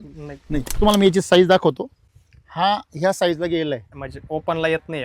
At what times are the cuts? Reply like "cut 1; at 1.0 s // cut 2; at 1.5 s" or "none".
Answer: cut 1; at 0.8 s // cut 2; at 4.0 s

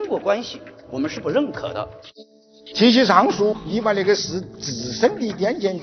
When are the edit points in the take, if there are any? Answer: cut 1; at 2.0 s // cut 2; at 3.6 s

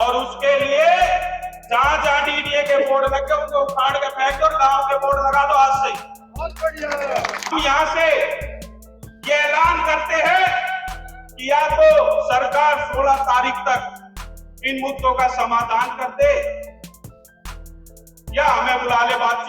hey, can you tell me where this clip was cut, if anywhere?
cut 1; at 7.5 s

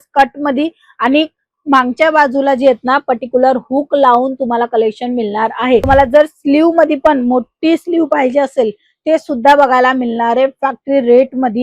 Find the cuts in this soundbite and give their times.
cut 1; at 5.8 s

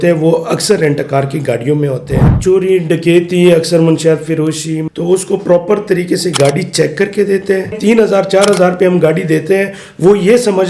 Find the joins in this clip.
cut 1; at 2.3 s // cut 2; at 4.7 s // cut 3; at 7.8 s

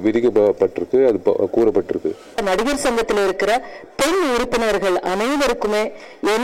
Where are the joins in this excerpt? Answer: cut 1; at 2.4 s

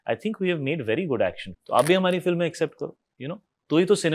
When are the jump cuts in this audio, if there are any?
cut 1; at 1.5 s

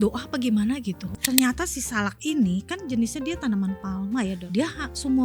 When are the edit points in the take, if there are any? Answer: cut 1; at 1.1 s // cut 2; at 4.4 s

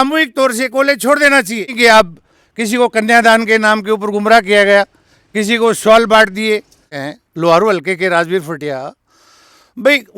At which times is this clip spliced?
cut 1; at 1.7 s // cut 2; at 7.0 s

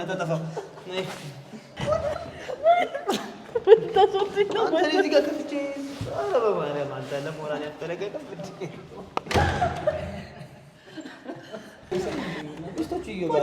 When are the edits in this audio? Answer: cut 1; at 1.7 s // cut 2; at 11.9 s

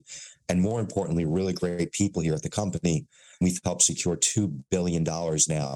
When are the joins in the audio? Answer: cut 1; at 3.4 s

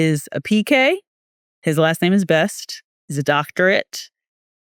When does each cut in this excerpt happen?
none

